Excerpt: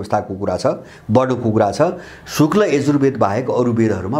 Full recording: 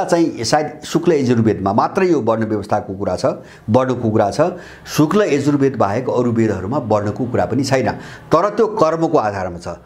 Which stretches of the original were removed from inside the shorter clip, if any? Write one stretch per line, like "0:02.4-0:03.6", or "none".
none